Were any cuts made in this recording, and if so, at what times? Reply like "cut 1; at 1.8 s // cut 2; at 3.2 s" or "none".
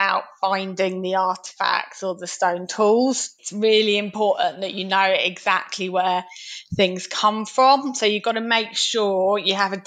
none